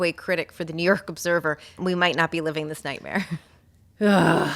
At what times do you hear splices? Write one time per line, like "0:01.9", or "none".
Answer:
0:01.8